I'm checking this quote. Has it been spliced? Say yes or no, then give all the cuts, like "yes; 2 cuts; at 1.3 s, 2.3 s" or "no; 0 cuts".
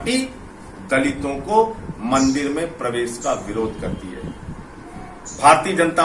no; 0 cuts